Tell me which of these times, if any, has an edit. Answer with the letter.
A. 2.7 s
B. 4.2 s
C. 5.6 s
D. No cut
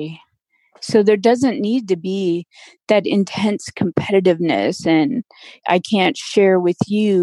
C